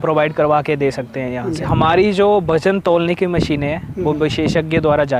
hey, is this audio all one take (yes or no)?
no